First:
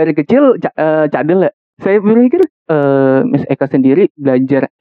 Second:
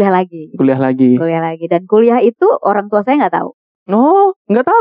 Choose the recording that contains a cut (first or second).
first